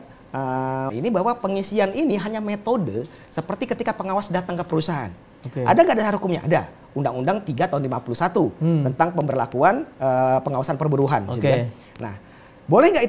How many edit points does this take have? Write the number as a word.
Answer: one